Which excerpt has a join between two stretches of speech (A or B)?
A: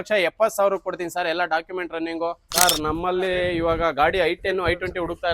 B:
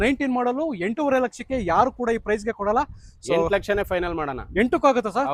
A